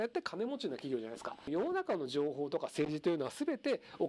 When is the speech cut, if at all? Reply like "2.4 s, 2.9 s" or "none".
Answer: 1.4 s

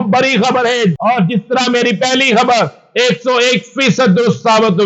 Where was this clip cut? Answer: 1.0 s

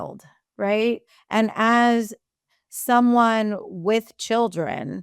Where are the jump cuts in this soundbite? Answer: 1.1 s

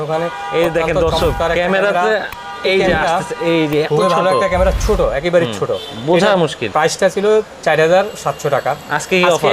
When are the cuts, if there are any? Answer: none

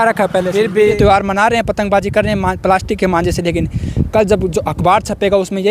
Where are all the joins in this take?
0.9 s

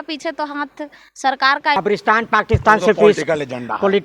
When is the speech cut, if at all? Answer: 1.8 s

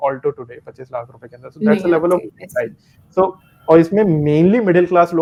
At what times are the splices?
none

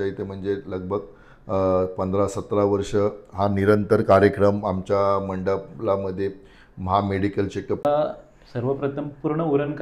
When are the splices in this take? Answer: 7.8 s

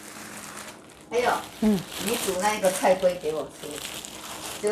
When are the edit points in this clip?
none

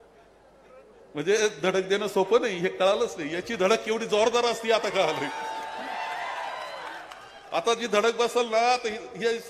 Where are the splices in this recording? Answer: none

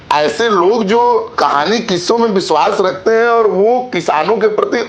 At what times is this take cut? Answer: 1.3 s

